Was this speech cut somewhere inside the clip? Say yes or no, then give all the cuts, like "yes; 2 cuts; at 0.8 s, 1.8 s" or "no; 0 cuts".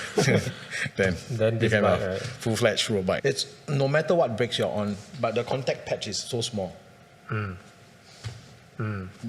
yes; 1 cut; at 3.2 s